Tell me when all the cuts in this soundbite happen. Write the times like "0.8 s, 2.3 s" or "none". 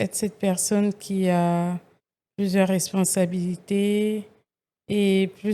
none